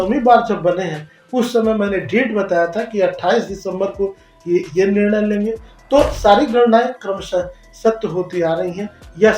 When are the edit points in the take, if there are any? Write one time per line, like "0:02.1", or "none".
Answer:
0:05.7

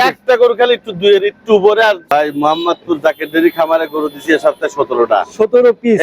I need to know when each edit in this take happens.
0:02.0

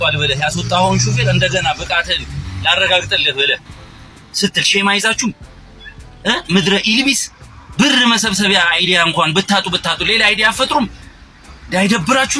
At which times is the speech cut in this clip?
none

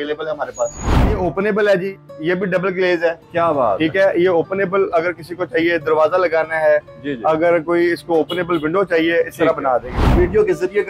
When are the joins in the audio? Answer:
0:01.1
0:10.1

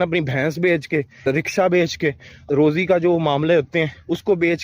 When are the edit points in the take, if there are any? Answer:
0:01.3
0:02.4

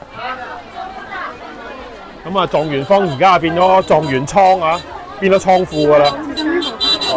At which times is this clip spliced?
none

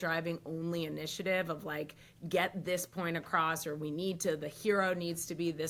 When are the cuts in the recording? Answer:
none

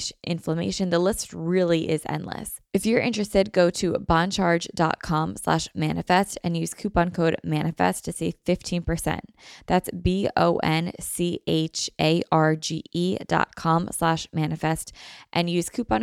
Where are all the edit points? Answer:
0:02.5

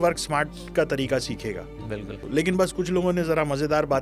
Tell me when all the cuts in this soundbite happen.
0:02.1

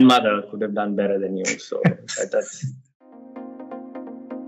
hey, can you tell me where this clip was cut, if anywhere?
0:03.1

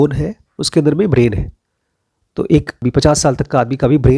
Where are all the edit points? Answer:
0:02.8

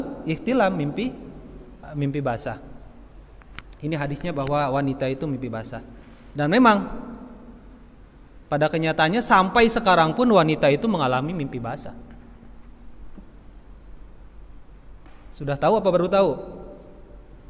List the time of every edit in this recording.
0:01.8

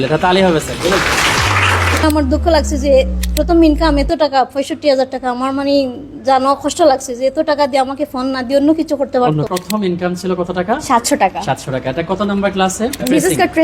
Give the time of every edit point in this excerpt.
0:02.0
0:09.5

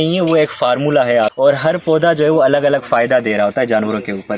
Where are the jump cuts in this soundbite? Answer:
0:01.3

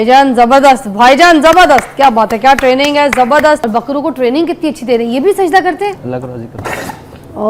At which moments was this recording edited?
0:03.7

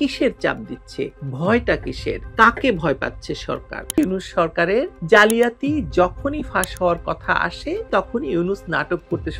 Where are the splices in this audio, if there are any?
0:01.2
0:04.0

